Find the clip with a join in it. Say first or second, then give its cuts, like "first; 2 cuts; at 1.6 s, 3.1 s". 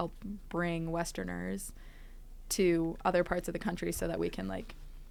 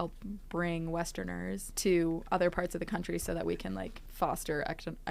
second; 2 cuts; at 1.7 s, 4.0 s